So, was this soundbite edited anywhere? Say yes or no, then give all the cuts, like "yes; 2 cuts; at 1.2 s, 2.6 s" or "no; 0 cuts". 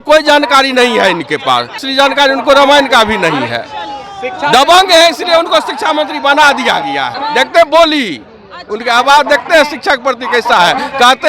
yes; 2 cuts; at 1.9 s, 7.1 s